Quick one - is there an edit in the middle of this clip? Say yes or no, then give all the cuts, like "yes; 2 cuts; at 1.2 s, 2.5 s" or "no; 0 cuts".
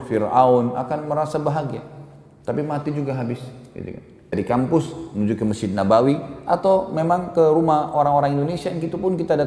yes; 1 cut; at 4.3 s